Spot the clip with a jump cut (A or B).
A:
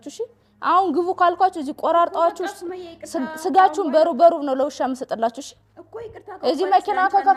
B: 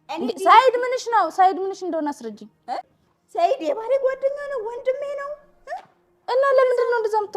B